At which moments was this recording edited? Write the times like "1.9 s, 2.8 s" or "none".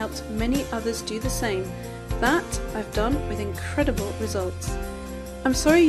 3.0 s